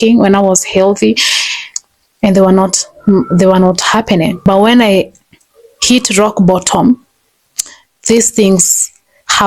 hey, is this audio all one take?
no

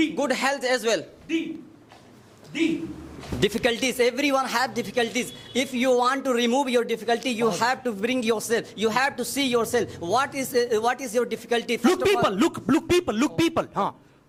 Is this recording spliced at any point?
no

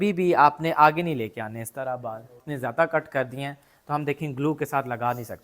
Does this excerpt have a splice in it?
yes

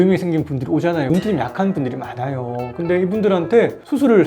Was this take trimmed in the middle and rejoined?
yes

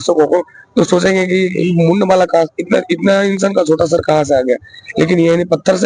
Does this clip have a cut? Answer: no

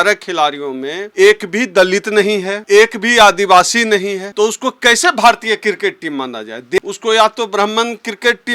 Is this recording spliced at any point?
yes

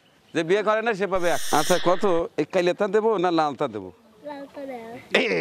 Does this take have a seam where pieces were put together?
yes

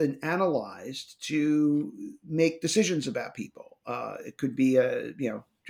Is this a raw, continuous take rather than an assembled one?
yes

